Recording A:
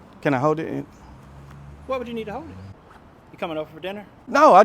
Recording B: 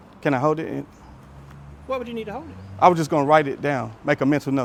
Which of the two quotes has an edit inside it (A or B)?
A